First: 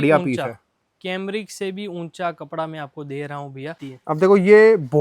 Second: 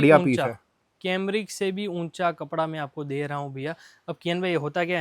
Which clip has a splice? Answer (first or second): first